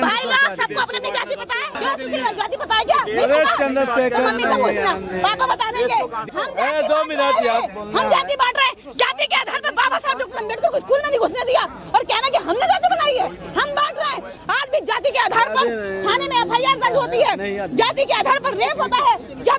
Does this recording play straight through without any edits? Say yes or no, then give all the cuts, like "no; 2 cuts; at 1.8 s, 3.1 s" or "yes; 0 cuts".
no; 3 cuts; at 1.8 s, 6.2 s, 14.4 s